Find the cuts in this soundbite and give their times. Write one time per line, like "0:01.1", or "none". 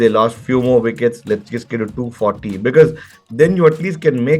none